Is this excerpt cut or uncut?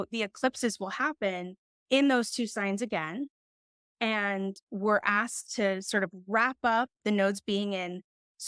cut